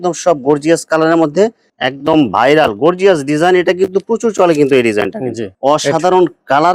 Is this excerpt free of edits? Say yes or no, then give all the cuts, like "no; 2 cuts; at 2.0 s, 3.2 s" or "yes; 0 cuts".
no; 2 cuts; at 1.7 s, 5.5 s